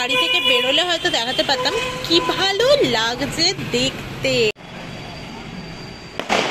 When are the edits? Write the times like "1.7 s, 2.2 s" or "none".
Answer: 4.7 s